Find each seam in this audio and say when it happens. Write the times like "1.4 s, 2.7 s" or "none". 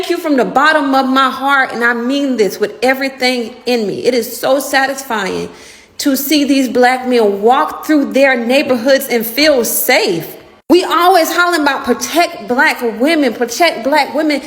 none